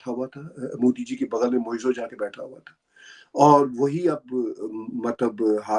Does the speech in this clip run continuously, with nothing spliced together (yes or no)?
yes